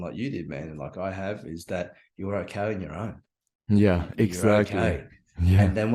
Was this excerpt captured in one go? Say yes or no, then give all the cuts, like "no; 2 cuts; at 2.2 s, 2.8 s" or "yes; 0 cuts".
yes; 0 cuts